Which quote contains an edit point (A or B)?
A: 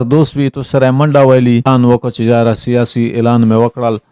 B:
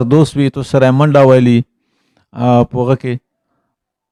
A